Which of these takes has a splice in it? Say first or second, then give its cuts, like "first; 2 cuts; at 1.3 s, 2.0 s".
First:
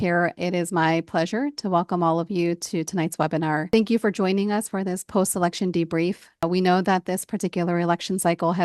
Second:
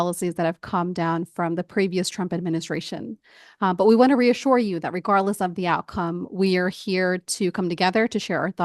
first; 2 cuts; at 3.7 s, 6.4 s